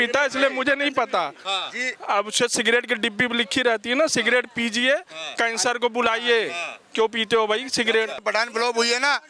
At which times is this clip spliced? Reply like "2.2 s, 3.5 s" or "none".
8.2 s